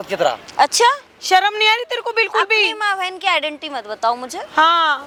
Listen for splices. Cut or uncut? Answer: uncut